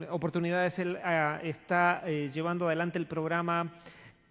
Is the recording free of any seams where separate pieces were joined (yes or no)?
no